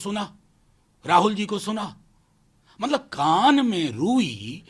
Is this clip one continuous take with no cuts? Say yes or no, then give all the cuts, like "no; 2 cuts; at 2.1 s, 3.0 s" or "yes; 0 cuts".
yes; 0 cuts